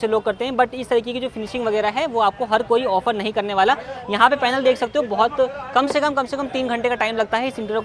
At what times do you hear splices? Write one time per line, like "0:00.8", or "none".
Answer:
none